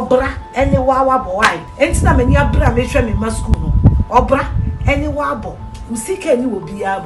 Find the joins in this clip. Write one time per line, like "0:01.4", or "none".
0:01.6